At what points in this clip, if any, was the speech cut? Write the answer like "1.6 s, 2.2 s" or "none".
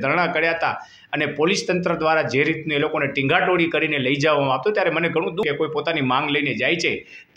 5.4 s